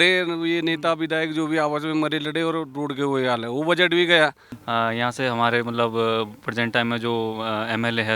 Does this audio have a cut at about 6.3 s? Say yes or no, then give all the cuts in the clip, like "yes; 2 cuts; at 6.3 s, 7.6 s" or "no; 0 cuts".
no; 1 cut; at 4.6 s